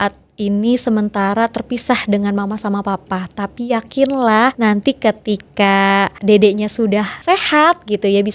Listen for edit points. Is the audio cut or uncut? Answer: cut